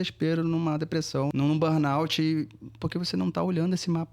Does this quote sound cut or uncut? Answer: cut